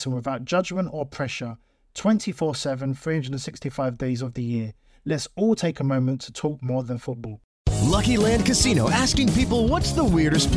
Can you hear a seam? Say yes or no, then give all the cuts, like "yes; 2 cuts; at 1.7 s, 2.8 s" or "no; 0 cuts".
yes; 1 cut; at 7.3 s